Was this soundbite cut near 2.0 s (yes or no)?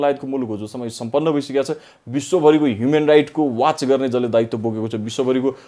no